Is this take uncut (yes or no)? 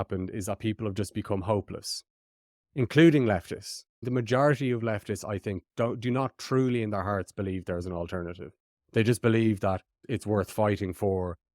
no